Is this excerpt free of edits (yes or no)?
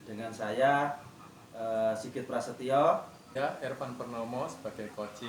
no